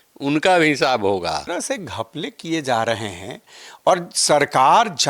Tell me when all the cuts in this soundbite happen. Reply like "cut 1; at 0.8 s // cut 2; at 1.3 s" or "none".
cut 1; at 1.5 s